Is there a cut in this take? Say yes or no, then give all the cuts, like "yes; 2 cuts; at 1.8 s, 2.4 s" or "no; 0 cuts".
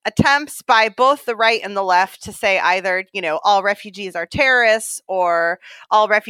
no; 0 cuts